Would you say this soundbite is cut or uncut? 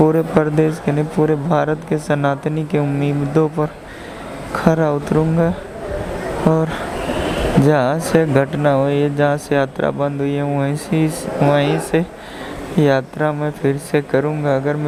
uncut